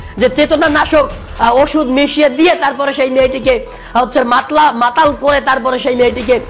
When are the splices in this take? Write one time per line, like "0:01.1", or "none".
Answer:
0:01.3